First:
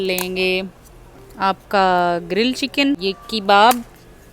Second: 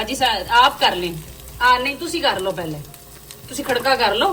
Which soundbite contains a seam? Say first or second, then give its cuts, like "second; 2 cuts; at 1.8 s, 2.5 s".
first; 1 cut; at 3.0 s